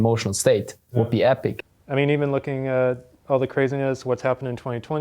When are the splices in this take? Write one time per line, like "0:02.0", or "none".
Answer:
0:01.7